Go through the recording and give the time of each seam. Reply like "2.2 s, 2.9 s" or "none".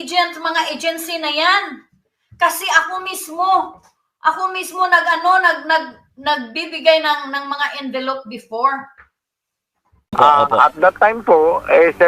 10.2 s